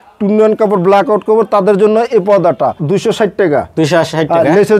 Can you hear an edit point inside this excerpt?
yes; 1 cut; at 2.8 s

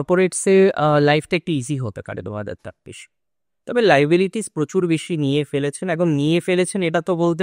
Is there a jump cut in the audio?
no; 0 cuts

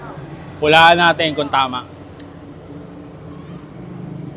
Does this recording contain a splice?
no; 0 cuts

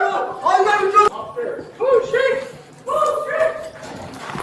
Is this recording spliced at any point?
yes; 1 cut; at 1.1 s

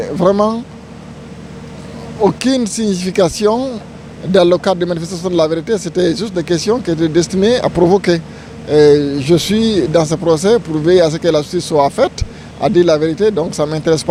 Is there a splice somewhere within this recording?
no; 0 cuts

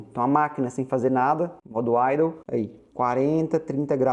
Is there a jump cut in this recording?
no; 0 cuts

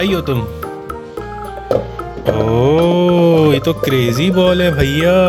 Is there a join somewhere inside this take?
no; 0 cuts

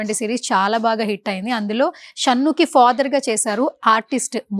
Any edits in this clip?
no; 0 cuts

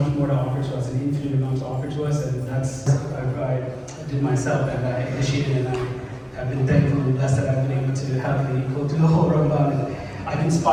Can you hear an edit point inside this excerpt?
no; 0 cuts

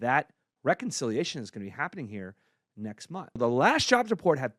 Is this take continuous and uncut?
no; 1 cut; at 3.4 s

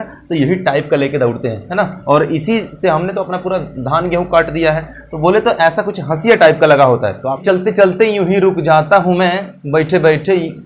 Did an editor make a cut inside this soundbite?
yes; 1 cut; at 7.4 s

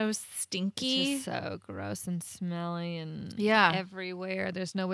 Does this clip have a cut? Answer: no; 0 cuts

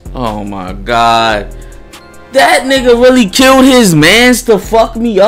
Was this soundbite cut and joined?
no; 0 cuts

